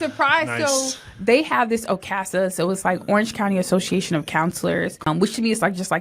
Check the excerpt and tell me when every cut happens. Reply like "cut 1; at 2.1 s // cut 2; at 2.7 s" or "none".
cut 1; at 5.1 s